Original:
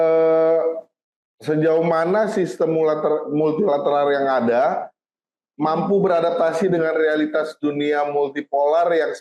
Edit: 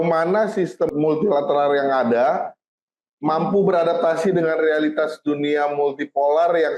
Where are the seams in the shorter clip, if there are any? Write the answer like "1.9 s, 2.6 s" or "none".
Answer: 0.9 s